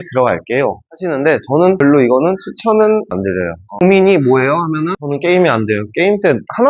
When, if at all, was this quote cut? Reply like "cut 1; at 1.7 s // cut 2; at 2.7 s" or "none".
cut 1; at 0.9 s // cut 2; at 1.8 s // cut 3; at 3.2 s // cut 4; at 5.0 s

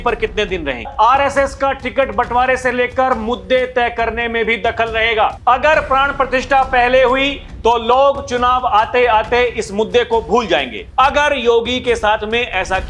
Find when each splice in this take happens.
cut 1; at 0.9 s // cut 2; at 5.4 s // cut 3; at 10.8 s

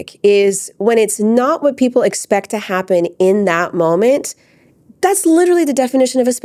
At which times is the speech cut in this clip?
none

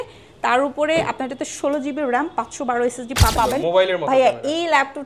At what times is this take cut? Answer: cut 1; at 3.3 s

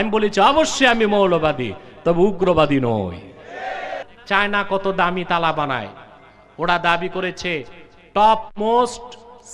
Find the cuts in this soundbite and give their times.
cut 1; at 4.1 s

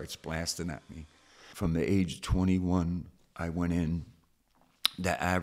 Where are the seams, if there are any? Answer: cut 1; at 1.4 s

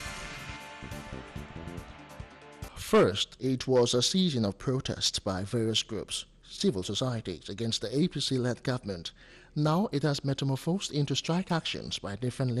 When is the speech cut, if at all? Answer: cut 1; at 2.7 s

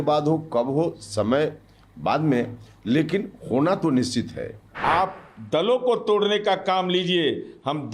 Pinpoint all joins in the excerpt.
cut 1; at 4.6 s

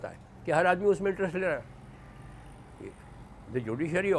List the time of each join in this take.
none

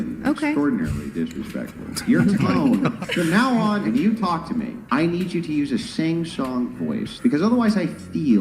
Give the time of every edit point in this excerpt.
cut 1; at 5.9 s

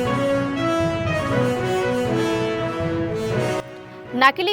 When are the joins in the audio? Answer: none

